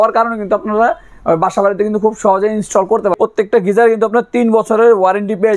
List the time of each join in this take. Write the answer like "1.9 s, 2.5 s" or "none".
3.2 s